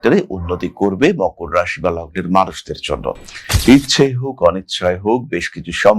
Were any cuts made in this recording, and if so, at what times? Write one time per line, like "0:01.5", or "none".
0:03.5

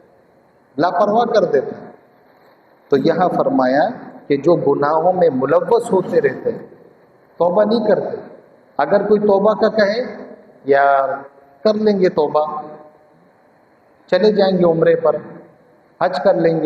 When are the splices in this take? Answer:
none

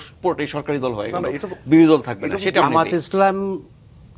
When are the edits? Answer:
0:02.6

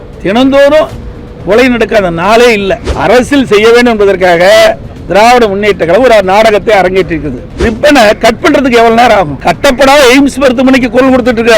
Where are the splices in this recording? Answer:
0:02.9
0:07.6
0:09.4

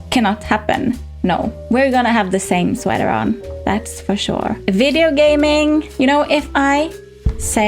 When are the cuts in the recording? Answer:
0:01.1
0:04.6

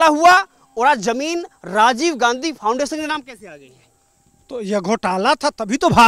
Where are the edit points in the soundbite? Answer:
none

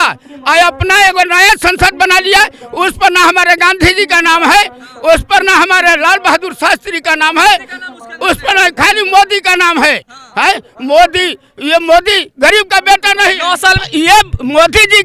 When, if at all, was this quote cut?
0:13.8

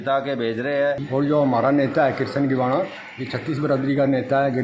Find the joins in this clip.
0:01.0

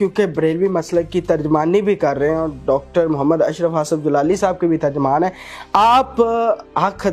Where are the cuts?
none

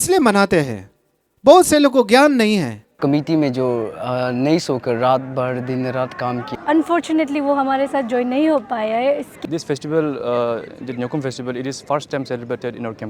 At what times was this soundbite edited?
0:03.0
0:06.5
0:09.4

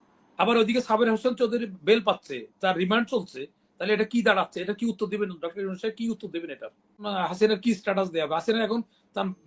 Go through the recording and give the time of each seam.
0:07.1

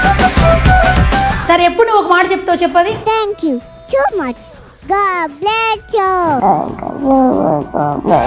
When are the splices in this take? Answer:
0:01.4

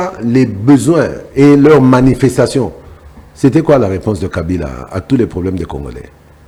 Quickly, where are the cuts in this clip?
none

